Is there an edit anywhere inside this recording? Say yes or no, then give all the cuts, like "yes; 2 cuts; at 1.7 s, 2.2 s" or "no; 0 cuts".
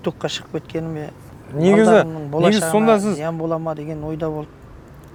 no; 0 cuts